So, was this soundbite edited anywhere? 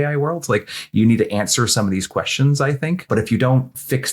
yes; 1 cut; at 3.1 s

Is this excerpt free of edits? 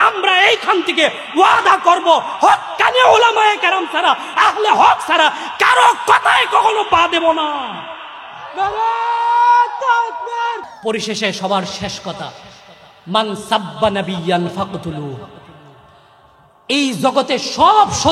no; 1 cut; at 10.7 s

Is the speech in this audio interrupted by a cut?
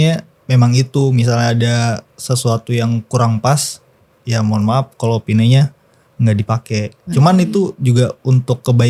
no; 0 cuts

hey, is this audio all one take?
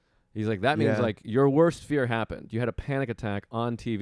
yes; 0 cuts

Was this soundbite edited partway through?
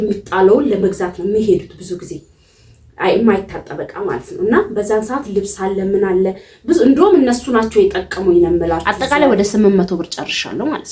yes; 1 cut; at 8.9 s

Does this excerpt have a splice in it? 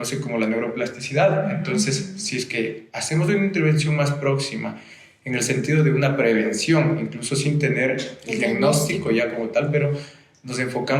no; 0 cuts

